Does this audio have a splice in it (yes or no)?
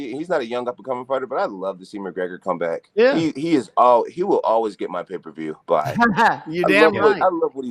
no